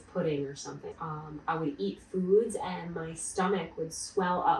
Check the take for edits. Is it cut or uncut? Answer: cut